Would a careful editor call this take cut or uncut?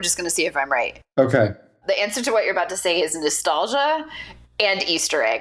cut